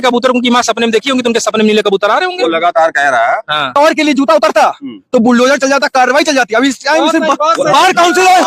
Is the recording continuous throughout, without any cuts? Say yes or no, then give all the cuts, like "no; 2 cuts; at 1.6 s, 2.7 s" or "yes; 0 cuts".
no; 1 cut; at 3.7 s